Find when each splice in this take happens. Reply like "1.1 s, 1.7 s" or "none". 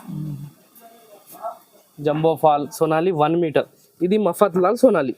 2.7 s